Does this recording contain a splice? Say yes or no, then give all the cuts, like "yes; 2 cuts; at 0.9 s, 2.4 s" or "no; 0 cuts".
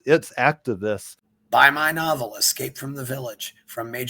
yes; 1 cut; at 1.2 s